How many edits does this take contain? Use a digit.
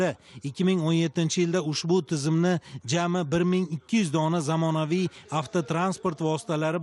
1